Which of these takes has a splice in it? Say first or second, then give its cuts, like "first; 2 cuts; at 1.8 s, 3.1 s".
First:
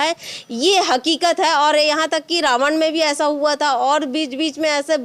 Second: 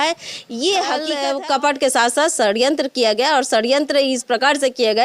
second; 1 cut; at 1.1 s